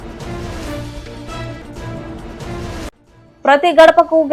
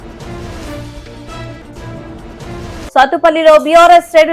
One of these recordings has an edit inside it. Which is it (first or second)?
second